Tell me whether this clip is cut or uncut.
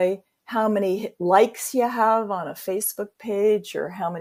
uncut